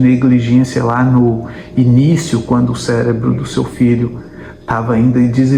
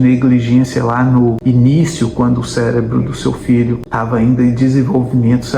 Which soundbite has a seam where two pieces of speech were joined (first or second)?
second